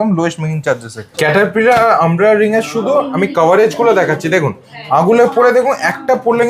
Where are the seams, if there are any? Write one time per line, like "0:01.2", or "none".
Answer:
0:01.0